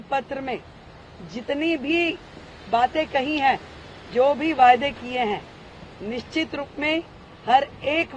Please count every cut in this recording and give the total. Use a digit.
0